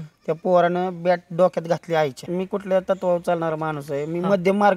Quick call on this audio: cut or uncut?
cut